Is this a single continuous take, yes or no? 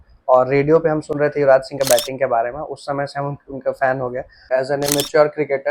no